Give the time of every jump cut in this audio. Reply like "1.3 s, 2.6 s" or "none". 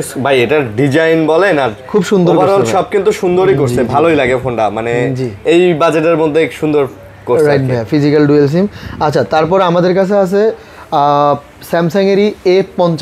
none